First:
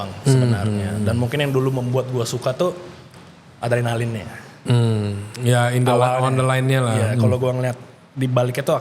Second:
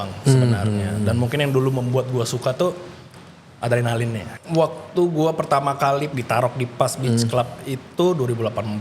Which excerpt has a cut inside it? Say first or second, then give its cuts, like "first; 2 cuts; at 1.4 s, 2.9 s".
second; 2 cuts; at 4.3 s, 6.1 s